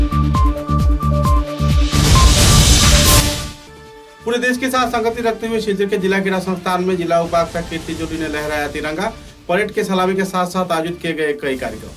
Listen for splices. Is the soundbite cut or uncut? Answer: cut